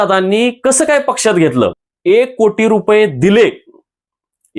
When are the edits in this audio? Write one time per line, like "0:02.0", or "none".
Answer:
0:01.9